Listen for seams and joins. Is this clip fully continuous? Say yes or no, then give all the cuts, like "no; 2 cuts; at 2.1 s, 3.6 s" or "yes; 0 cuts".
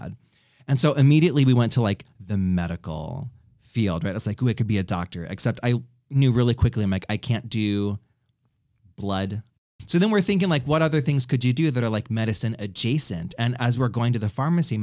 no; 1 cut; at 9.5 s